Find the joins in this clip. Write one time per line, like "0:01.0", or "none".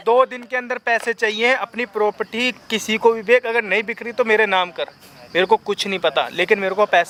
none